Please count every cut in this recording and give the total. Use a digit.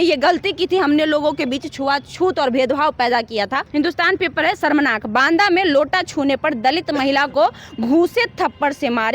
1